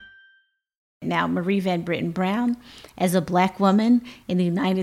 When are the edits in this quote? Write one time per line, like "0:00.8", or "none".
0:01.0